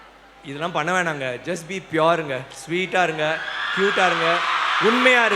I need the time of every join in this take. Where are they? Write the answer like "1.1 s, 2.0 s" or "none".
none